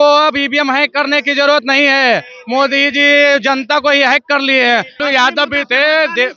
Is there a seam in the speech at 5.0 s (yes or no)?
yes